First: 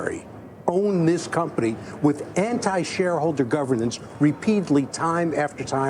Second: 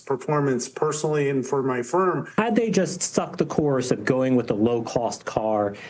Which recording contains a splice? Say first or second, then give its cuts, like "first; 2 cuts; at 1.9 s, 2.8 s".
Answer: second; 1 cut; at 2.2 s